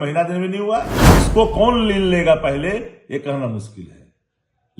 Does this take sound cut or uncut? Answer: cut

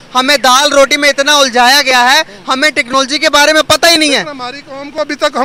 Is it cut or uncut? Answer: uncut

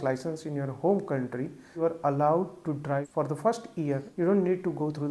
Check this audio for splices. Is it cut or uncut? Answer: cut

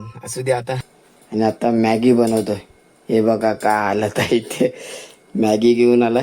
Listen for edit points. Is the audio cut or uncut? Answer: cut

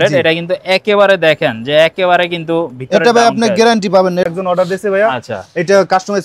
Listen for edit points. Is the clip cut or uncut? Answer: cut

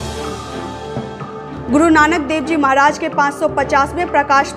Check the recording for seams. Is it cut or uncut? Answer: cut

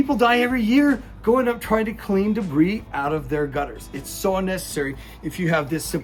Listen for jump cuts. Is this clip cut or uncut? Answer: uncut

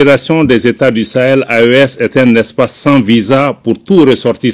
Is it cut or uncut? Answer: uncut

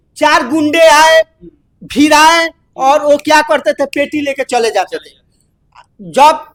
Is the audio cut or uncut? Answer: uncut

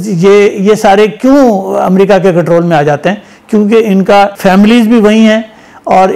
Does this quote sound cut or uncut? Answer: cut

